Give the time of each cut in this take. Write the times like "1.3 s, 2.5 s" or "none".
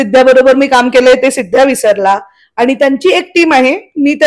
none